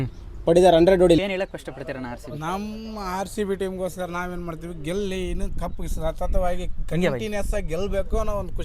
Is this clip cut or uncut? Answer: cut